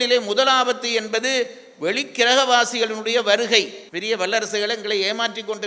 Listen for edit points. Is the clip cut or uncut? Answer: cut